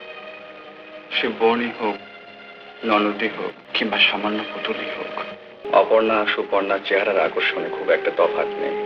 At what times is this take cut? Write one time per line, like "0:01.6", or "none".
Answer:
0:03.6
0:05.6